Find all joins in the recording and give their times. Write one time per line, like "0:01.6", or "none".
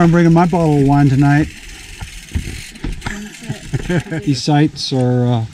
0:04.1

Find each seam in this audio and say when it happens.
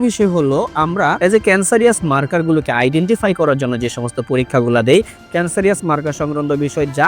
0:01.2

